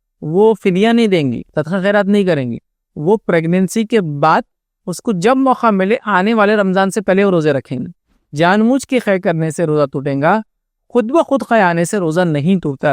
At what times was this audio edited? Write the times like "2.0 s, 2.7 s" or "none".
1.5 s, 8.3 s